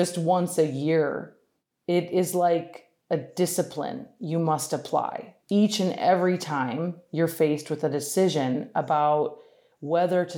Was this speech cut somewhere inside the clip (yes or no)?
yes